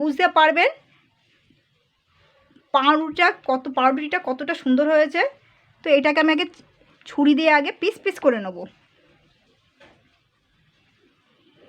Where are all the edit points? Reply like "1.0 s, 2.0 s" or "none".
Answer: none